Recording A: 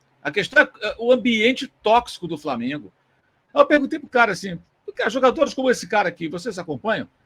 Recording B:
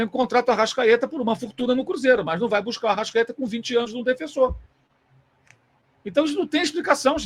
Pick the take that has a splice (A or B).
A